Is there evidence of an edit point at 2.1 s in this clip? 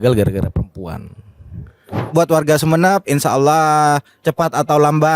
yes; 1 cut; at 2.1 s

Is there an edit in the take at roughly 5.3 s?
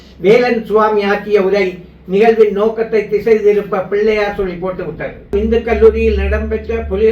yes; 1 cut; at 5.3 s

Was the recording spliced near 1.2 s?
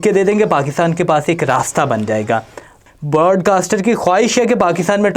no; 1 cut; at 2.7 s

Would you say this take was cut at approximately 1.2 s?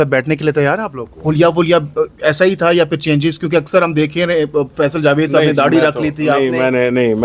yes; 1 cut; at 1.2 s

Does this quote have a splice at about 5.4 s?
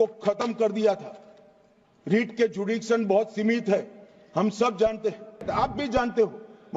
yes; 1 cut; at 5.4 s

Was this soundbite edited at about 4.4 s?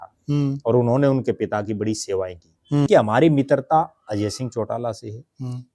no; 1 cut; at 2.9 s

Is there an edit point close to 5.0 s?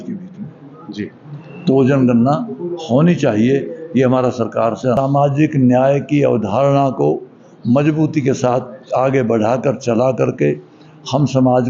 yes; 1 cut; at 5.0 s

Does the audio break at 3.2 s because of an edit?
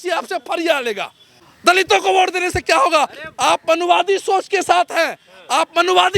no; 1 cut; at 1.5 s

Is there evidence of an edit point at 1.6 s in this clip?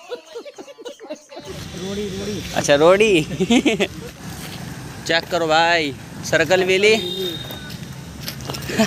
yes; 2 cuts; at 1.6 s, 4.1 s

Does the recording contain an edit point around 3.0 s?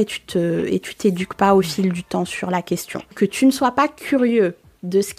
yes; 1 cut; at 3.0 s

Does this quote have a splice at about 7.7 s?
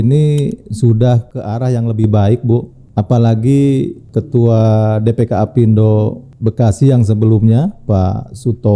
no; 4 cuts; at 1.4 s, 2.8 s, 4.0 s, 6.3 s

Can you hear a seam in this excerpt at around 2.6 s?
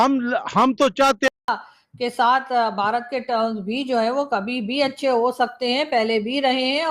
no; 1 cut; at 1.3 s

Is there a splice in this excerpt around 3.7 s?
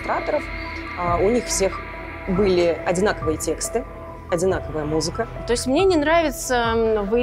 no; 1 cut; at 5.4 s

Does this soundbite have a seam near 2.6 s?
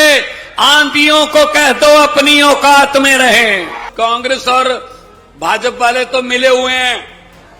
no; 1 cut; at 3.8 s

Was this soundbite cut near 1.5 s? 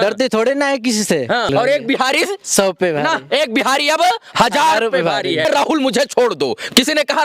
yes; 2 cuts; at 1.5 s, 5.5 s

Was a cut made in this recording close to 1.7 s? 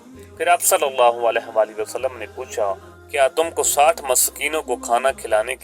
no; 1 cut; at 2.9 s

